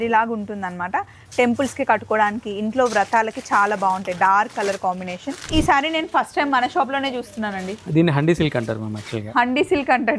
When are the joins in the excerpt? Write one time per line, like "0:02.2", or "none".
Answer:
0:05.5